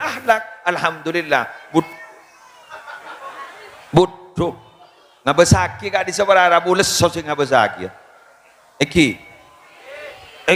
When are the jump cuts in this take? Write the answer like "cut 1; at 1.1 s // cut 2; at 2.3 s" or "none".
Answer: none